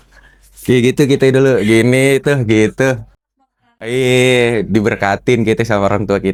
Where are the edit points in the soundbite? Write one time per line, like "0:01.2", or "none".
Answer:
none